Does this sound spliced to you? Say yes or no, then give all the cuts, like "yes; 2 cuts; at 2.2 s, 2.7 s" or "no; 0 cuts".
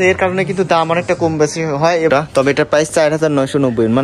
yes; 1 cut; at 2.1 s